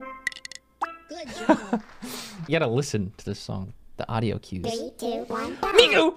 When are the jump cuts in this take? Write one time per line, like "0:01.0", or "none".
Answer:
0:02.4